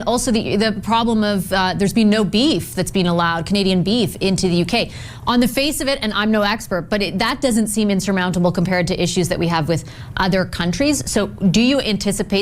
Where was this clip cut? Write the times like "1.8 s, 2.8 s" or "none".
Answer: 0.9 s